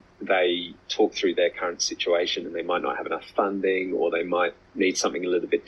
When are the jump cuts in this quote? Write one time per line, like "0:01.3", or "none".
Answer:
none